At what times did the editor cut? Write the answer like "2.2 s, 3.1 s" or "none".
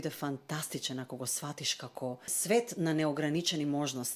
2.3 s